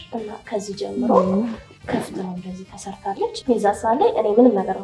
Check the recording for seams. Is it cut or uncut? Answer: cut